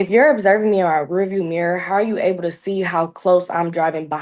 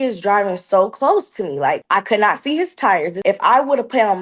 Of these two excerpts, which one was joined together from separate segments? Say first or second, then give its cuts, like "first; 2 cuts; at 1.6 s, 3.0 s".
second; 2 cuts; at 1.8 s, 3.1 s